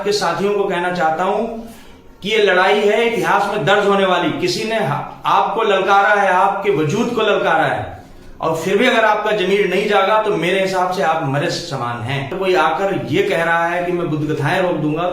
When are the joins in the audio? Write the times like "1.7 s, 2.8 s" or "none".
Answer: 12.3 s